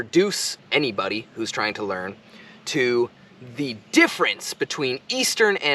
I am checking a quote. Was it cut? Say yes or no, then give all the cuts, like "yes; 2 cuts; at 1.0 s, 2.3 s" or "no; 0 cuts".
no; 0 cuts